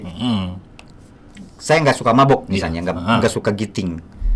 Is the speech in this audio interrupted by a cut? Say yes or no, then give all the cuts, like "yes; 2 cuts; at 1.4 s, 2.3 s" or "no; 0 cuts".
no; 0 cuts